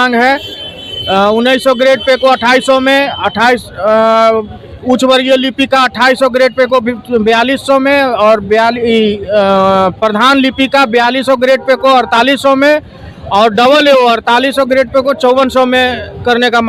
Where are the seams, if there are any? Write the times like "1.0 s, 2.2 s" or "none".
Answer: none

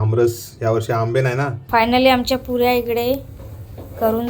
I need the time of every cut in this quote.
1.6 s

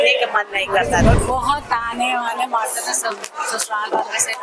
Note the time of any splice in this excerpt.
1.1 s

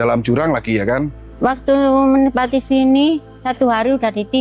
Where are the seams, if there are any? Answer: 1.2 s, 3.4 s

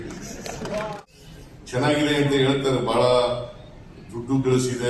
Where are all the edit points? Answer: 1.0 s

